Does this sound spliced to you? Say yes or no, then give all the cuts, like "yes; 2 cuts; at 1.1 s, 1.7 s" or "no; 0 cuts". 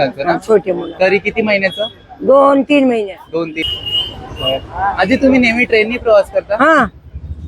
yes; 1 cut; at 3.6 s